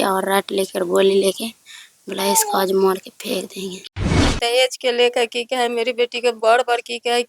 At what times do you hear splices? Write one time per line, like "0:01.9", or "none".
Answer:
0:03.9